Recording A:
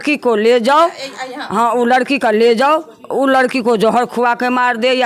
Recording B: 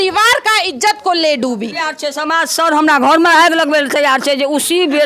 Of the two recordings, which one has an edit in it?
B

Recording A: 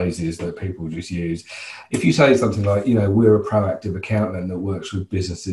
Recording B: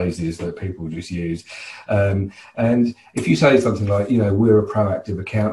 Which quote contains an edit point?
A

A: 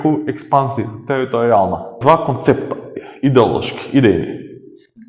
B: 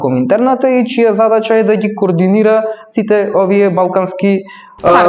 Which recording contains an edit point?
A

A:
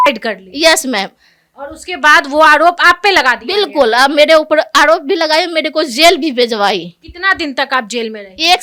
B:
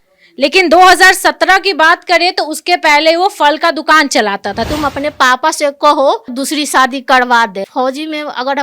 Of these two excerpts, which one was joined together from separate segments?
B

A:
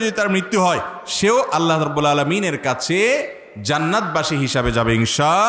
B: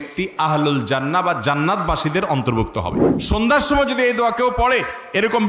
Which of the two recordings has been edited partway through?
B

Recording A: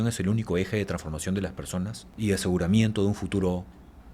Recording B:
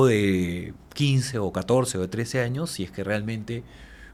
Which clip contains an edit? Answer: A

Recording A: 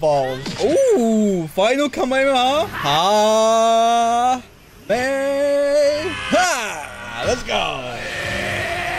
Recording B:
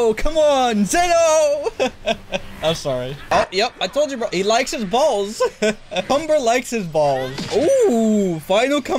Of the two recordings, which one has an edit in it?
B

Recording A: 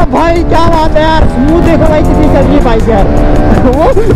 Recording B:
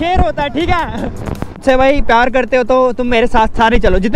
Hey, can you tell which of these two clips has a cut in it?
B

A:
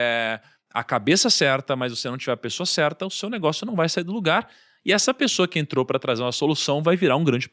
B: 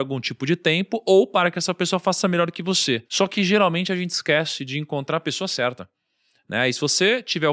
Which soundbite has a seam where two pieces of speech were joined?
B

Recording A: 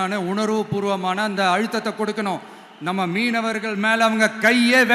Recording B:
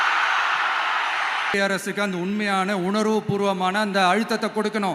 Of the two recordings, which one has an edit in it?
B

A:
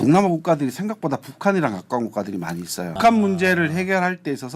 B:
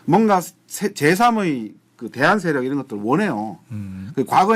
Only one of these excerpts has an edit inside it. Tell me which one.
A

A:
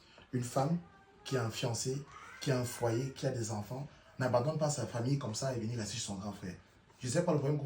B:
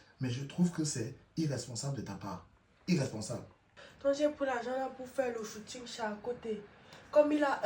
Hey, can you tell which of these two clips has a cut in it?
B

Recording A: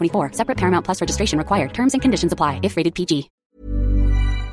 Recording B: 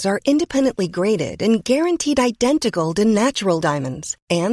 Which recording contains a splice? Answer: A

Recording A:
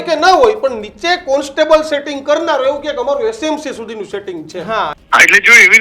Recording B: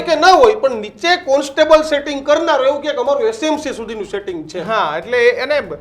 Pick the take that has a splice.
A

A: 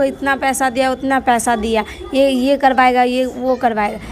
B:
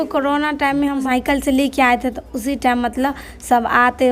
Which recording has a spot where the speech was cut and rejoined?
B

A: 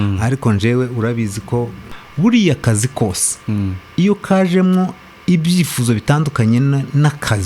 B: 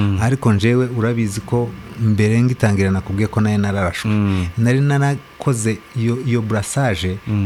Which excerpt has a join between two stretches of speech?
A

